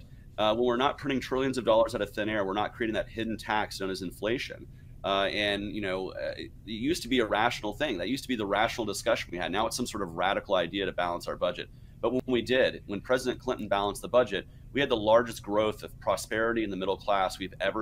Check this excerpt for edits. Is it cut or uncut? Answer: cut